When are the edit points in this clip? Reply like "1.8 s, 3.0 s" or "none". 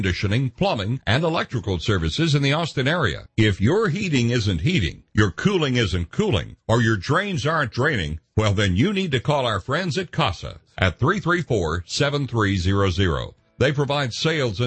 3.2 s